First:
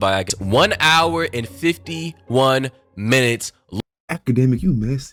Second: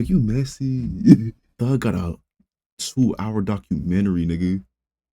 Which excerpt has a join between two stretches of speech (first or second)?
second